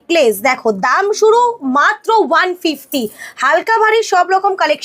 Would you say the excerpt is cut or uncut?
uncut